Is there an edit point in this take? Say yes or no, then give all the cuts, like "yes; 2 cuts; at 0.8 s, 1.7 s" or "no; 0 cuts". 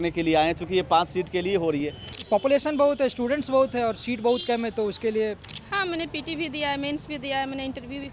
yes; 2 cuts; at 2.0 s, 5.5 s